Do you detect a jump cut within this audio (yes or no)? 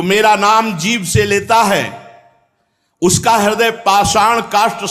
no